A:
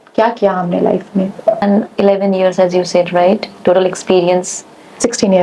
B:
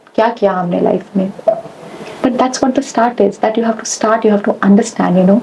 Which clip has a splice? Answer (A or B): A